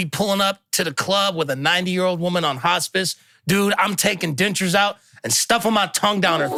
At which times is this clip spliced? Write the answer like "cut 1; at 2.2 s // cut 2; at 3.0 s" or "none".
none